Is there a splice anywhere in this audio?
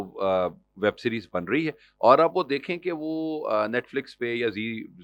no; 0 cuts

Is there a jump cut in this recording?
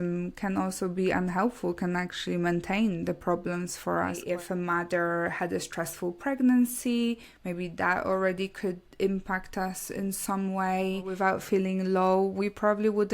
yes; 2 cuts; at 4.2 s, 11.1 s

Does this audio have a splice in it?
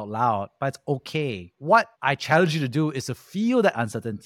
yes; 1 cut; at 1.9 s

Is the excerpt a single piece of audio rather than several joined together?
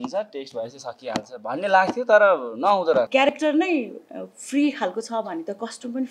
no; 1 cut; at 3.3 s

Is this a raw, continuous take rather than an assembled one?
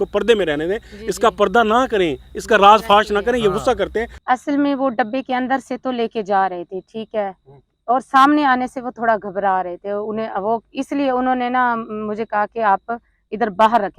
no; 1 cut; at 4.1 s

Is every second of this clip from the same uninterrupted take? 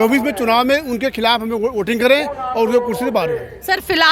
yes; 0 cuts

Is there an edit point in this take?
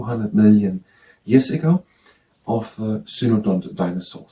no; 0 cuts

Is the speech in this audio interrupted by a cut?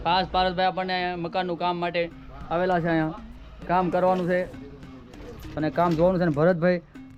no; 0 cuts

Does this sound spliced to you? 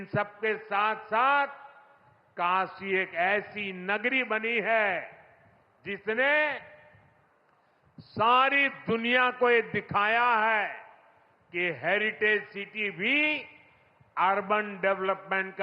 no; 0 cuts

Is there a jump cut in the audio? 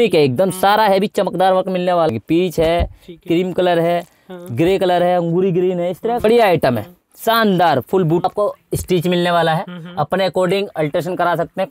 yes; 3 cuts; at 2.1 s, 6.2 s, 8.2 s

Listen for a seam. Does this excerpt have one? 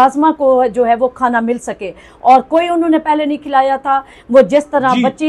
no; 0 cuts

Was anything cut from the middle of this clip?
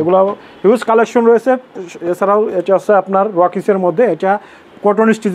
no; 0 cuts

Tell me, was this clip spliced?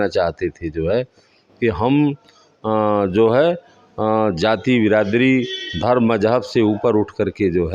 no; 0 cuts

